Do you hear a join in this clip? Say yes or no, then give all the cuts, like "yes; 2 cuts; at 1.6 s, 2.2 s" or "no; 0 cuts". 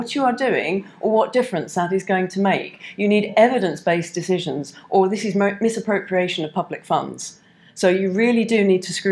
no; 0 cuts